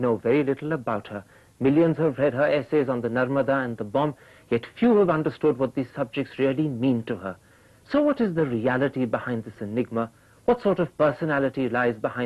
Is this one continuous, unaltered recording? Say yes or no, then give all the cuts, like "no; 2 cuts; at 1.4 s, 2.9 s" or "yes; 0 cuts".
no; 1 cut; at 10.3 s